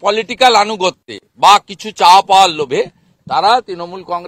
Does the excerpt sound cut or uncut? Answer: uncut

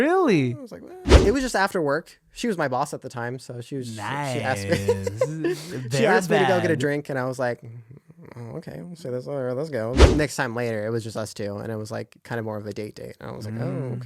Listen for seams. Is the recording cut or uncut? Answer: cut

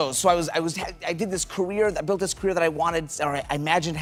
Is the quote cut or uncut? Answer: uncut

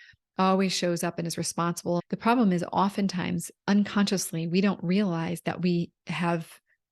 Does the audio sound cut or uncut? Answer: cut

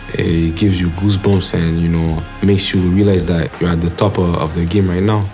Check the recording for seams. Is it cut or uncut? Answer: cut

